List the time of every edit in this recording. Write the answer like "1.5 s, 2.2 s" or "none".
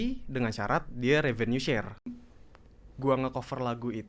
2.2 s